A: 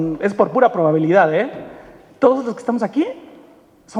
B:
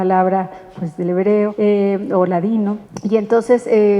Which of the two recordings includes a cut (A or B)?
B